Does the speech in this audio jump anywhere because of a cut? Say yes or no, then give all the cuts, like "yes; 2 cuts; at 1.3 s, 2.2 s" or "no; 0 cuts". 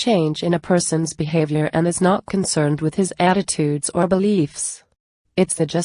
yes; 1 cut; at 3.9 s